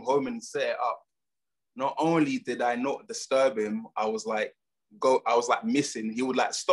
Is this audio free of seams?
yes; 0 cuts

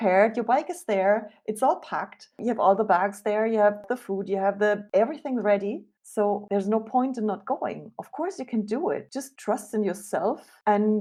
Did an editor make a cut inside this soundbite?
no; 0 cuts

